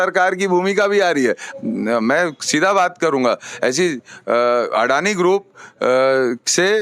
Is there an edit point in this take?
yes; 1 cut; at 1.5 s

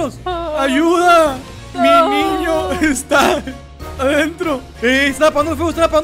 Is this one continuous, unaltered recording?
yes; 0 cuts

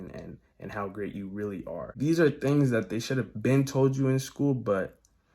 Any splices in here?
yes; 1 cut; at 1.9 s

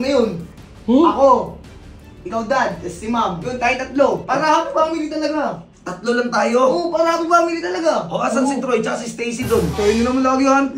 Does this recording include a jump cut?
no; 0 cuts

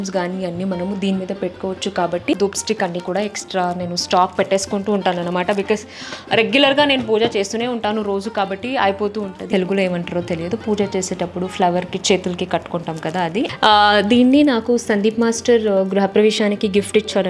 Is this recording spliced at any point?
yes; 3 cuts; at 2.4 s, 9.5 s, 13.5 s

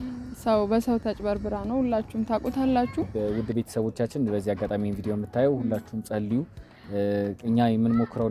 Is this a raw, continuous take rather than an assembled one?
no; 1 cut; at 3.1 s

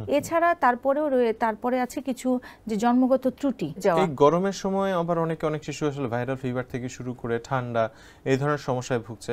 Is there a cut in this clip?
yes; 1 cut; at 3.8 s

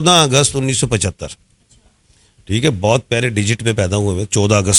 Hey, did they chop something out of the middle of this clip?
no; 0 cuts

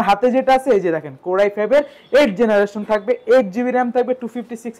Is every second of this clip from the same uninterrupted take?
yes; 0 cuts

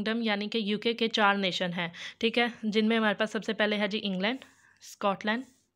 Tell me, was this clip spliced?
no; 0 cuts

